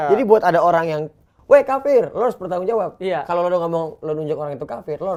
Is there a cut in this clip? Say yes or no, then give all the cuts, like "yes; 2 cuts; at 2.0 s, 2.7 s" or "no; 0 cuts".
no; 0 cuts